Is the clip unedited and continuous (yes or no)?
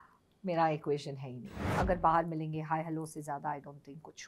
no